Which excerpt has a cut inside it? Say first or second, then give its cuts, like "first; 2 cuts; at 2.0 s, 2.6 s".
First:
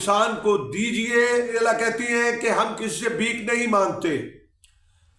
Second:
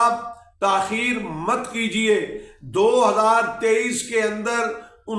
first; 1 cut; at 1.5 s